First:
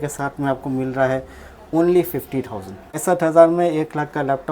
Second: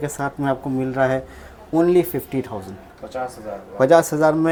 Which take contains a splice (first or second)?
first